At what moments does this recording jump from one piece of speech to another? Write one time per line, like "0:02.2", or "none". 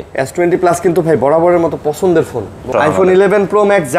0:02.7